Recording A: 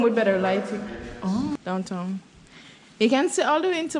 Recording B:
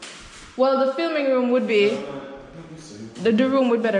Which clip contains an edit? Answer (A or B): A